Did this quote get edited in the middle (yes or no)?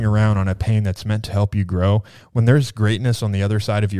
no